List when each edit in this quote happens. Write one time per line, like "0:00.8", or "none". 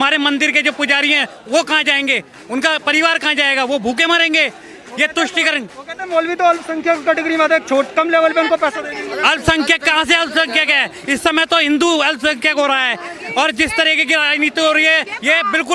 none